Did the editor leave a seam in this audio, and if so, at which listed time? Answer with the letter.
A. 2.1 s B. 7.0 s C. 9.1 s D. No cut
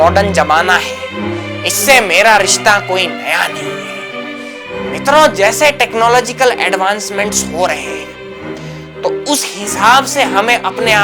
D